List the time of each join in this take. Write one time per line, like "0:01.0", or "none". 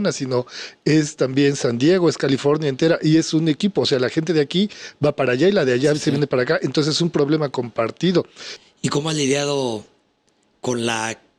0:08.5